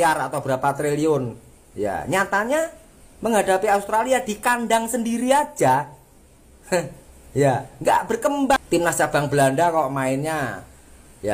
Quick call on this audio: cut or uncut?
cut